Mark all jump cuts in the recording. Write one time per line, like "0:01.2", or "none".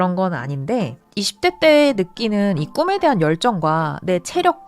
0:01.0